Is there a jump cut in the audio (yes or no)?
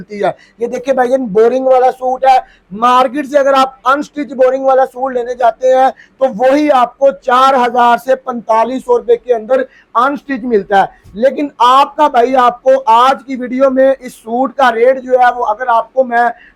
no